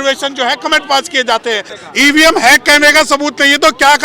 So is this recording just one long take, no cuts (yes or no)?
no